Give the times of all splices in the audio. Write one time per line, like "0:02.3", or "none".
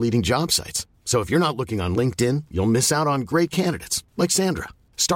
none